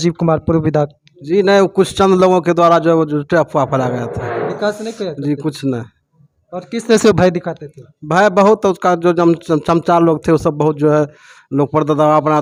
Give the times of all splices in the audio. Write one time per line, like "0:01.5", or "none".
none